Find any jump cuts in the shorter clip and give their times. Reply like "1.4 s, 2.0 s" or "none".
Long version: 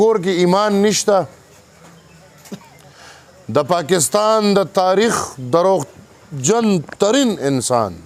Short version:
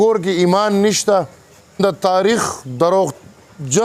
1.8 s